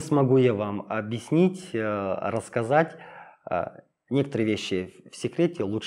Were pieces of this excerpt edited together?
no; 0 cuts

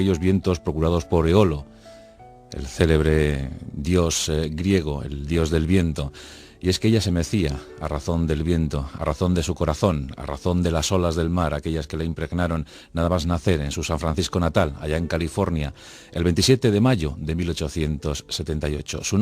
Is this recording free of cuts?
no; 1 cut; at 13.3 s

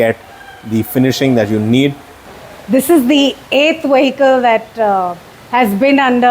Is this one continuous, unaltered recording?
no; 1 cut; at 2.3 s

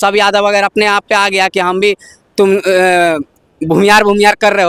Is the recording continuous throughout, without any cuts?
yes; 0 cuts

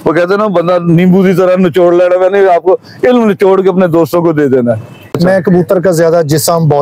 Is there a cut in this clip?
yes; 1 cut; at 5.1 s

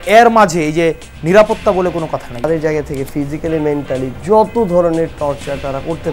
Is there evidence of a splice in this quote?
yes; 1 cut; at 2.4 s

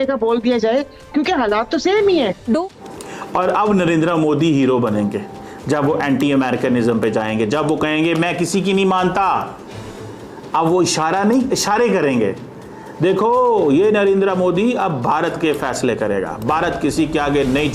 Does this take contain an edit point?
yes; 1 cut; at 2.6 s

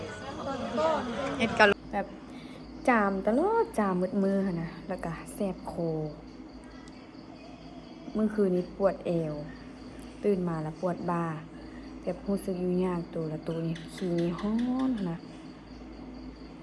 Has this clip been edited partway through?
yes; 1 cut; at 1.7 s

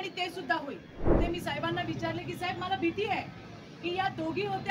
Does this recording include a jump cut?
yes; 1 cut; at 1.2 s

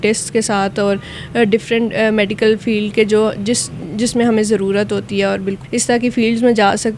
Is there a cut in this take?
yes; 1 cut; at 5.6 s

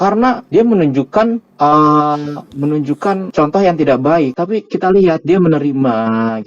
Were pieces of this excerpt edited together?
yes; 2 cuts; at 3.3 s, 4.4 s

